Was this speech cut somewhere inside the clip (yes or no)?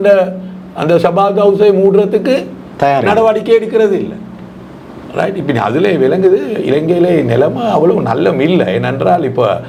no